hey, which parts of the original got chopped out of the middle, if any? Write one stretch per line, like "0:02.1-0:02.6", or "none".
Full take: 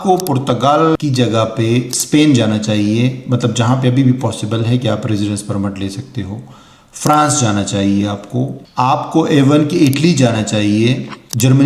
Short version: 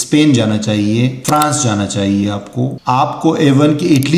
0:03.2-0:07.0
0:08.5-0:08.7